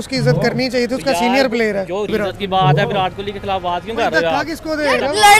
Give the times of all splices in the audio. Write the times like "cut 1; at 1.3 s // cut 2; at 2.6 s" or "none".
cut 1; at 2.1 s